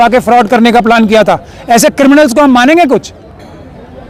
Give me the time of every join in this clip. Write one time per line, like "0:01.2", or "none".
none